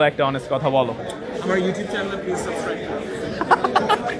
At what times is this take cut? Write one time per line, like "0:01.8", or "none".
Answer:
none

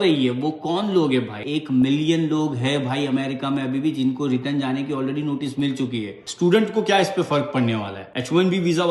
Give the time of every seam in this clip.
0:01.4
0:06.2

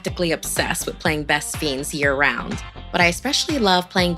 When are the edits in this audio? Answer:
none

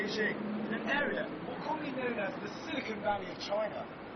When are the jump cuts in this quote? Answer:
0:02.8

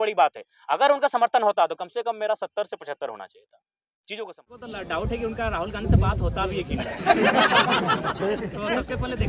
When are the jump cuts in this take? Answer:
0:04.7

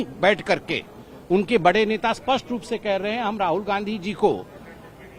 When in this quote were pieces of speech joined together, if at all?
none

